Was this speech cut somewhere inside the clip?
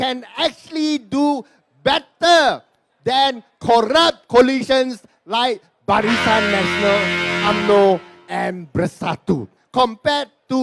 yes; 1 cut; at 9.6 s

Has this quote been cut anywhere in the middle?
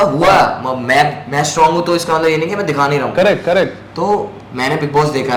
no; 0 cuts

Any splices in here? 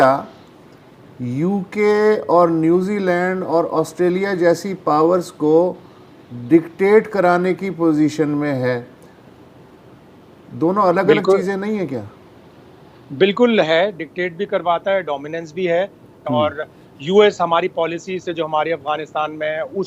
no; 0 cuts

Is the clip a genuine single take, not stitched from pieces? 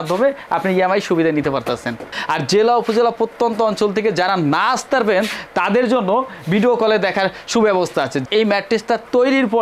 no; 2 cuts; at 2.1 s, 8.2 s

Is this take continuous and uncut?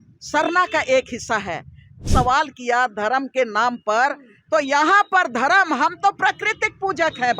no; 1 cut; at 2.1 s

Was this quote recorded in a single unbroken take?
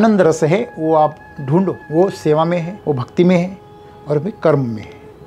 no; 2 cuts; at 1.8 s, 2.7 s

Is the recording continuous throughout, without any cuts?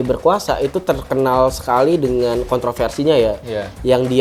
yes; 0 cuts

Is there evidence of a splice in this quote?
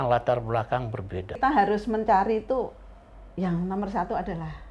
yes; 1 cut; at 1.4 s

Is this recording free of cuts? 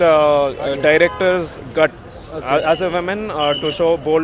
yes; 0 cuts

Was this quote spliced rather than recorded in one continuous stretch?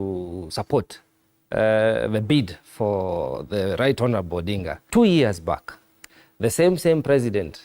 yes; 1 cut; at 4.7 s

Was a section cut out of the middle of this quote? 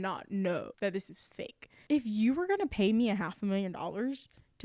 yes; 1 cut; at 1.7 s

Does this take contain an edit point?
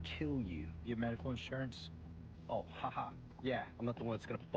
no; 0 cuts

